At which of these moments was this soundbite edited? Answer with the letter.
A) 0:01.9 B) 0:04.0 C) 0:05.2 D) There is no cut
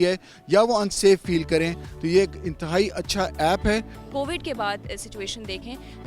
B